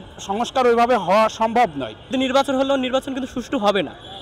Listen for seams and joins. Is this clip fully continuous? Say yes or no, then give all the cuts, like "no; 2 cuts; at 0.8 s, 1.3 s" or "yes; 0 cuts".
no; 1 cut; at 2.1 s